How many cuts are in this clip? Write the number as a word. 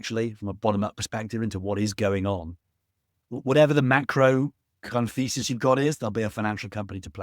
one